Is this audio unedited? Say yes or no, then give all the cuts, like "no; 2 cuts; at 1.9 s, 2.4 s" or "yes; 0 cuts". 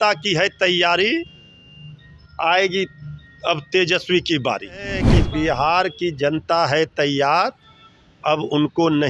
no; 1 cut; at 5.1 s